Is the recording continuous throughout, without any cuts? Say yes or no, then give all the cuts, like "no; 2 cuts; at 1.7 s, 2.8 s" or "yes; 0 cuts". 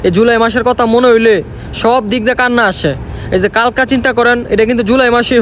yes; 0 cuts